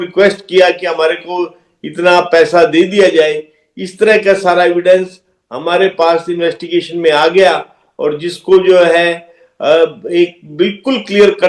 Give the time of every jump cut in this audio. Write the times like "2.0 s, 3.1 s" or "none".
none